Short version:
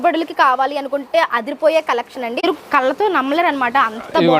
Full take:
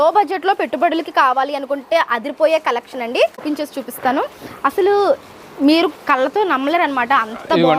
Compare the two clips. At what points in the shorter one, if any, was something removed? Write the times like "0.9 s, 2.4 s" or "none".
2.4 s